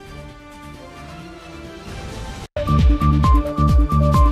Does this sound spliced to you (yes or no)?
yes